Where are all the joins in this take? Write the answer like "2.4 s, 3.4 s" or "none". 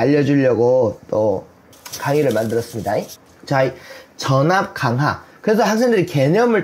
none